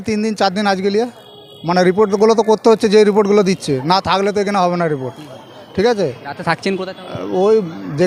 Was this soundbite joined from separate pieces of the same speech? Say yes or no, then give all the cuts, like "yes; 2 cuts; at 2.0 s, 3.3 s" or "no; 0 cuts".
no; 0 cuts